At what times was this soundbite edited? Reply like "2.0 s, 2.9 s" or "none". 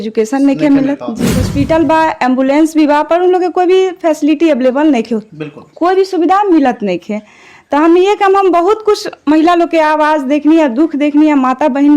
1.4 s